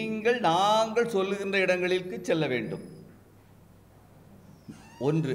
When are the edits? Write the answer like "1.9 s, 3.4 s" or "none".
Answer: none